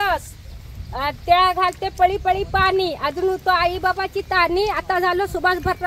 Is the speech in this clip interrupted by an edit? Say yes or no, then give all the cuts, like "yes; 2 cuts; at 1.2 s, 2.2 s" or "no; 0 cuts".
no; 0 cuts